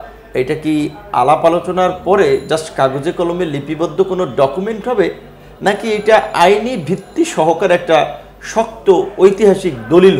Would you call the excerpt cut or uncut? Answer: uncut